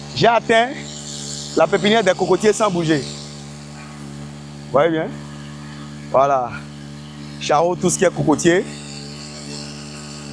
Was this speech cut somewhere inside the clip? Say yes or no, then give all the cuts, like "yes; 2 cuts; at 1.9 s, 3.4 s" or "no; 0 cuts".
no; 0 cuts